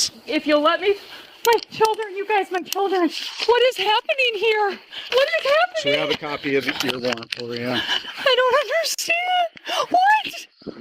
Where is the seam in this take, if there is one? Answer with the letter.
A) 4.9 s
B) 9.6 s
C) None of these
A